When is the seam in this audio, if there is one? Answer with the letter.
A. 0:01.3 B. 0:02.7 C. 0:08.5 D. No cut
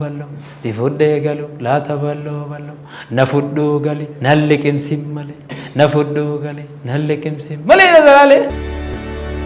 C